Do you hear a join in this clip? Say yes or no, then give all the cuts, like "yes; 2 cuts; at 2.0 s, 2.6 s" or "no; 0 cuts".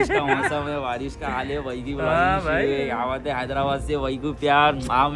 no; 0 cuts